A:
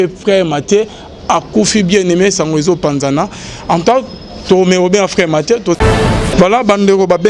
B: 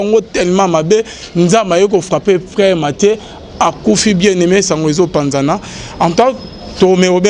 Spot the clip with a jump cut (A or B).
A